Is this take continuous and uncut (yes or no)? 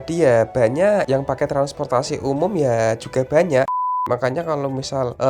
no